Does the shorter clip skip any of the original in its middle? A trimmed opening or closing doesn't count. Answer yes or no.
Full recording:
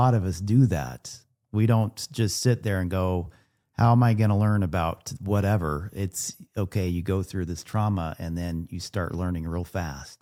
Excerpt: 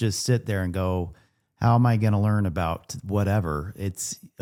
no